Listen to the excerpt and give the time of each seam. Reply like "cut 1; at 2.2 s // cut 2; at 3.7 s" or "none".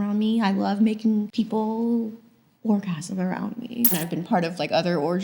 cut 1; at 1.3 s // cut 2; at 3.9 s